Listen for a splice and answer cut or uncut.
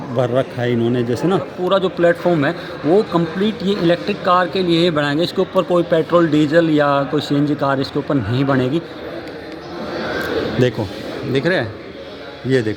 cut